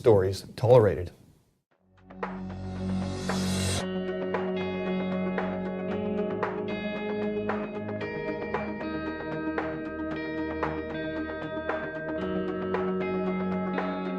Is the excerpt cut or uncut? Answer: cut